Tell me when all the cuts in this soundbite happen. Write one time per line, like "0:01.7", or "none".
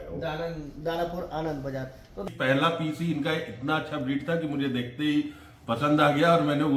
0:02.3